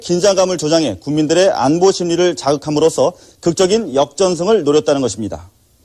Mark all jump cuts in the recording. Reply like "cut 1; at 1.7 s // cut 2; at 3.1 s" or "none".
none